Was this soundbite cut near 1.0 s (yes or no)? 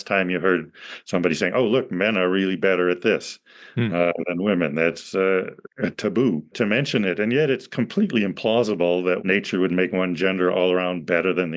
no